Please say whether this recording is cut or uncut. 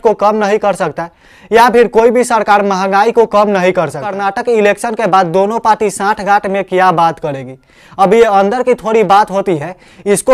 cut